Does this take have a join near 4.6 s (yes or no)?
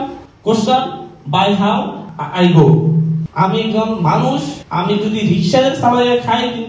yes